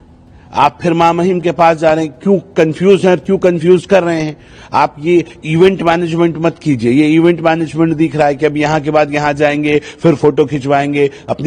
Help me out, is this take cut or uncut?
uncut